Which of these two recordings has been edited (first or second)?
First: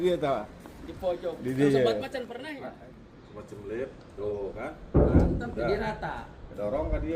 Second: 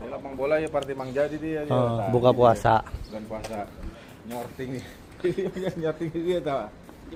first